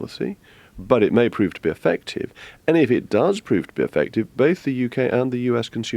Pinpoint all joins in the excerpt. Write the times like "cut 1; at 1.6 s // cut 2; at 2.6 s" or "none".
none